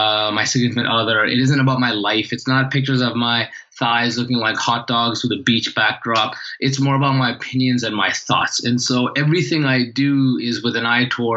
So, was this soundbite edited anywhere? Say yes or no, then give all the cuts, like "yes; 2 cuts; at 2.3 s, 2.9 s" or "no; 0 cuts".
no; 0 cuts